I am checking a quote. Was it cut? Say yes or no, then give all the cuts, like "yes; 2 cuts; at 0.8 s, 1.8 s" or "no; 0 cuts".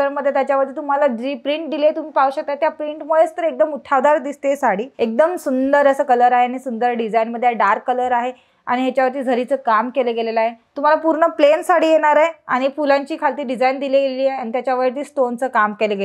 yes; 2 cuts; at 4.9 s, 10.6 s